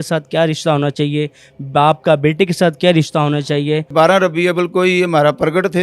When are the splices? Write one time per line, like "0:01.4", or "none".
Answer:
0:03.9